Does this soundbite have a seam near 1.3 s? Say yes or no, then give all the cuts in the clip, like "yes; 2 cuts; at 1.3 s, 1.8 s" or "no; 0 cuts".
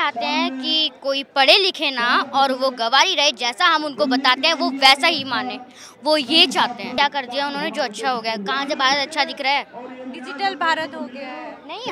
no; 1 cut; at 6.9 s